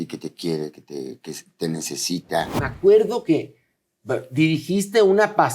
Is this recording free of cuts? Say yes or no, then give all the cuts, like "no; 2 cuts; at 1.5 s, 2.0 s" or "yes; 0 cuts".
no; 1 cut; at 2.6 s